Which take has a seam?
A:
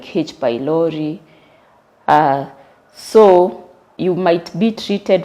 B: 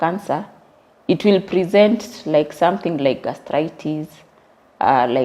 A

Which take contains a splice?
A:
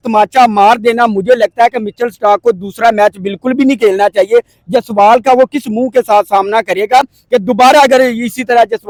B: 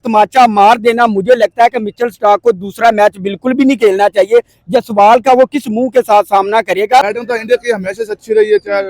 B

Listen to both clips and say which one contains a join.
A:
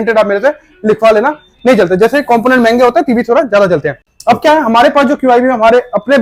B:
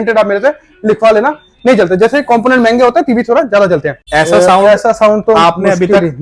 B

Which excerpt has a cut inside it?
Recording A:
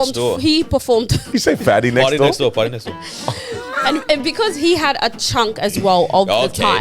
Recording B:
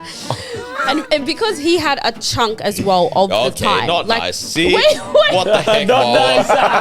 A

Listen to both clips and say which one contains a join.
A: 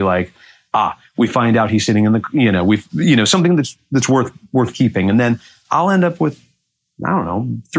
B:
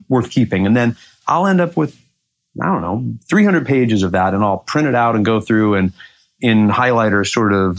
B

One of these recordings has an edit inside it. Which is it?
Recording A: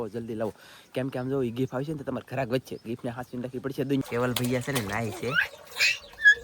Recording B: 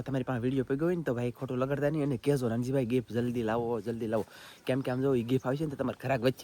A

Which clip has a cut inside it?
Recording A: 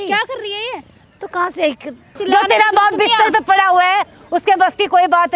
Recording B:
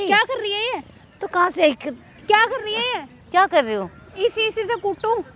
A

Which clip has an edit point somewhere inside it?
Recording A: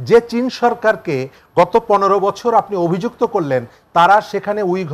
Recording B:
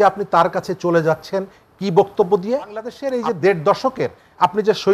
B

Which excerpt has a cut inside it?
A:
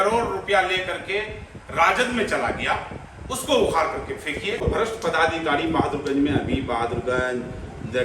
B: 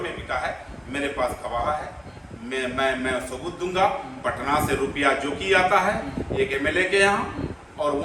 A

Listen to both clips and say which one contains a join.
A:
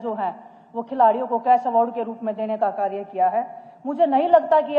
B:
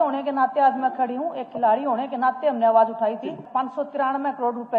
B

